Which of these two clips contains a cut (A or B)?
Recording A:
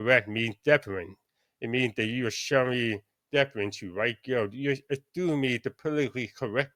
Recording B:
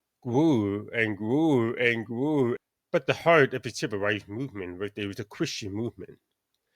B